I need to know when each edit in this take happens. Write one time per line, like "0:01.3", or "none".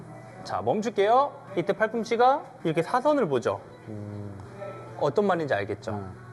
0:01.4
0:02.5